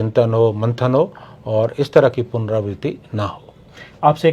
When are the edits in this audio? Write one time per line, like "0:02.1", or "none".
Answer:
none